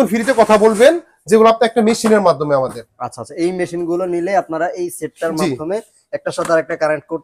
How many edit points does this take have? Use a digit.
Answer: 0